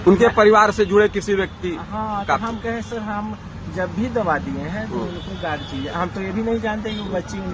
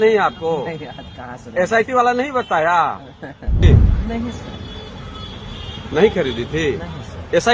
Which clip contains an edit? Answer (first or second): second